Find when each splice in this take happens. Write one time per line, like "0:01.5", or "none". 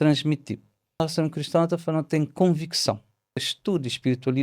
0:01.0
0:03.5